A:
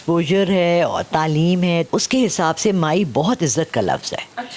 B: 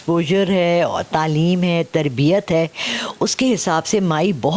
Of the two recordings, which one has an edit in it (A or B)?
A